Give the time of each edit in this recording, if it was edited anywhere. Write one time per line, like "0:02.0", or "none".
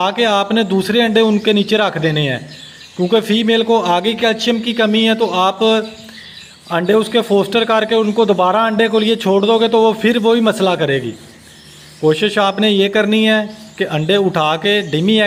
none